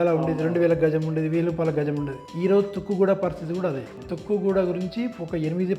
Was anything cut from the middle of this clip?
no; 0 cuts

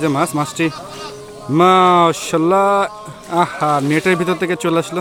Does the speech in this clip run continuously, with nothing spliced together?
yes; 0 cuts

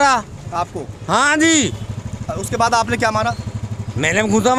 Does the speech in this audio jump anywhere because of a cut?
no; 0 cuts

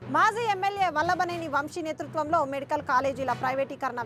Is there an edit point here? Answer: no; 0 cuts

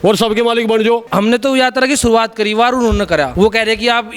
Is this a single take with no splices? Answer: no; 2 cuts; at 1.1 s, 3.3 s

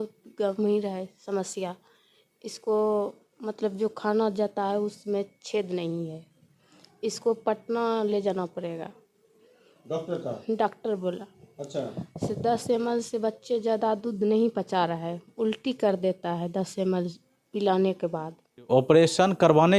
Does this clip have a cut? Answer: yes; 1 cut; at 18.7 s

